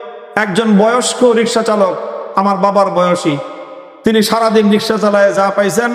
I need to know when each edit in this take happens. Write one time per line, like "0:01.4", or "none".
none